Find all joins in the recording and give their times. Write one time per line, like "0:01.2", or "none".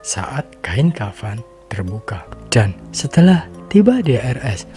0:02.3